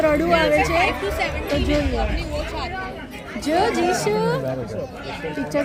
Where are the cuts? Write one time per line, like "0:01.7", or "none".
none